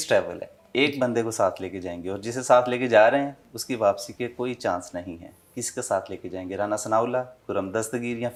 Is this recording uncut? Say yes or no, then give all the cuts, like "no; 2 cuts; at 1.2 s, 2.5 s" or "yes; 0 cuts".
yes; 0 cuts